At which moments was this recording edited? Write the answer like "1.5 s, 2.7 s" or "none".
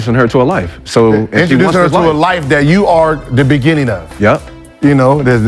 4.6 s